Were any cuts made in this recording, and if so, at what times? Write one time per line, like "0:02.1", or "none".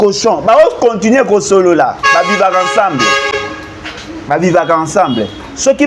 none